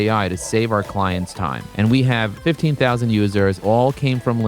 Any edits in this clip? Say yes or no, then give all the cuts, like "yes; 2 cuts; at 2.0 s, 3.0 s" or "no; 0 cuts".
yes; 3 cuts; at 1.6 s, 2.3 s, 3.6 s